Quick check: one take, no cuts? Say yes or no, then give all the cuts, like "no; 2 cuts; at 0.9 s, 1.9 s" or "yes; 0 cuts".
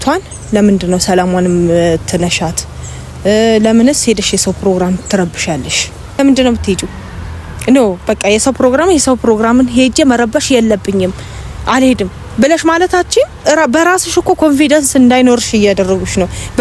no; 1 cut; at 6.2 s